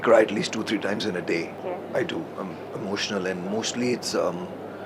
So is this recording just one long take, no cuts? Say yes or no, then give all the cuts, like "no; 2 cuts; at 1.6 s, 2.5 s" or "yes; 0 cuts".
no; 1 cut; at 1.6 s